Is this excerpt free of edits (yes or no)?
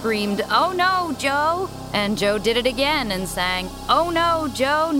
no